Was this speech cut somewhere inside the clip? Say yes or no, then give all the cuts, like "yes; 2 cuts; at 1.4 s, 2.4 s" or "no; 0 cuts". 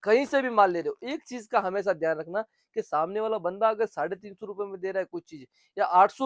no; 0 cuts